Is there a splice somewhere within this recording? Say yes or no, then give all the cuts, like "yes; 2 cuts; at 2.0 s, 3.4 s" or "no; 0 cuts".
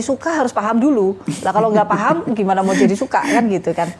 no; 0 cuts